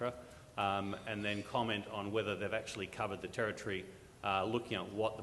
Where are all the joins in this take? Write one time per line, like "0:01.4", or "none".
0:01.9